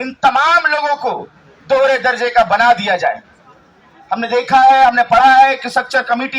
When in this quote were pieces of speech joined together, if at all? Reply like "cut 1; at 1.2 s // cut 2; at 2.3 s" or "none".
none